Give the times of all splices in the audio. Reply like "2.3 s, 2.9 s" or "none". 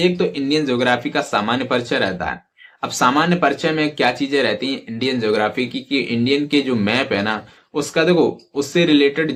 none